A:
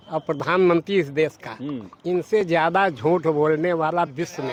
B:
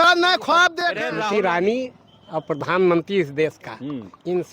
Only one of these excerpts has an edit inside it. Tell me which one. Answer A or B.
B